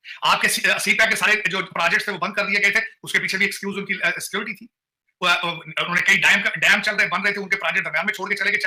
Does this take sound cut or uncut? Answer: uncut